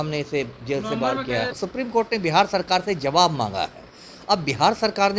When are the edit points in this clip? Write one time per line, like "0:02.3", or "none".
0:01.5

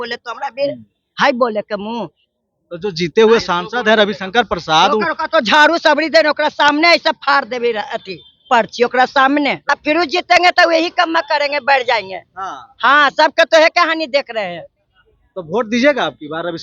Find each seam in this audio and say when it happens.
none

